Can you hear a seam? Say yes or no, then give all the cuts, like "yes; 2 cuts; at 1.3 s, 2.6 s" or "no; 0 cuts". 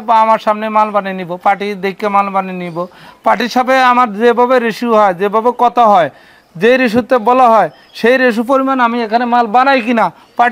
no; 0 cuts